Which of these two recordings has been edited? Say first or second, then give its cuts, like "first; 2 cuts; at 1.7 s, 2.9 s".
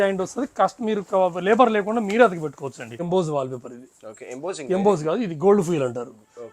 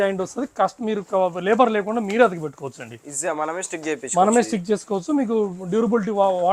first; 1 cut; at 3.0 s